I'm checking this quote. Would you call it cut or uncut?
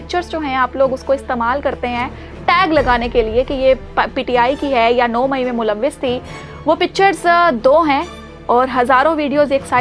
uncut